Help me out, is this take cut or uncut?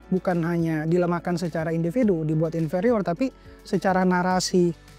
uncut